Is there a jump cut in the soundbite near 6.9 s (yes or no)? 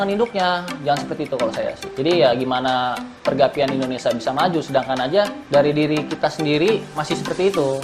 yes